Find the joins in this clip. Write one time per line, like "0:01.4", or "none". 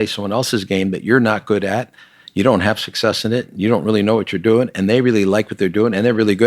none